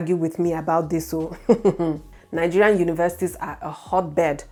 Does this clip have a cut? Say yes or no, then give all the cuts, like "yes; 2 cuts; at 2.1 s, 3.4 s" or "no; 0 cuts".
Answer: no; 0 cuts